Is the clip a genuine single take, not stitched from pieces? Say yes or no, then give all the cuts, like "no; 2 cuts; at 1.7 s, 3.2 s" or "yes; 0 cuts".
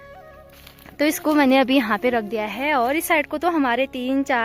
yes; 0 cuts